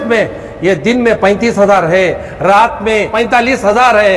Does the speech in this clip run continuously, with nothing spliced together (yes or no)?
no